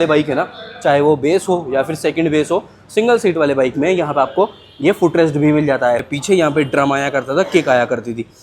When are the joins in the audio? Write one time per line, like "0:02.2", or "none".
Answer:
0:06.0